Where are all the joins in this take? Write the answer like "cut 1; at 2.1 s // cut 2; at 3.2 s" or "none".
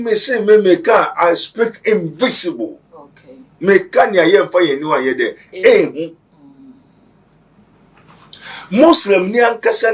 none